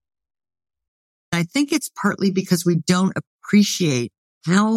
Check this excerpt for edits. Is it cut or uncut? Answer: cut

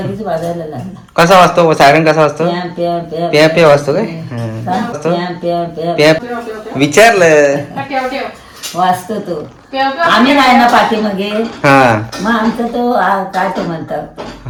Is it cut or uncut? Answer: uncut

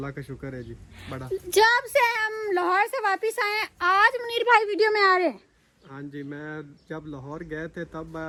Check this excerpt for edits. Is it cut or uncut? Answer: uncut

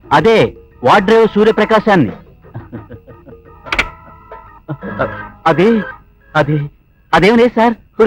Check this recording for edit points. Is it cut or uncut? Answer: uncut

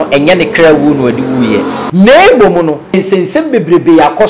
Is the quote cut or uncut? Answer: cut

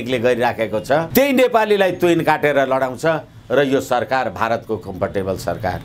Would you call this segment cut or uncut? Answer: cut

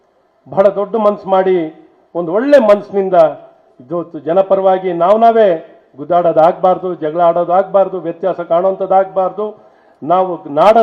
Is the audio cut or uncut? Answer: cut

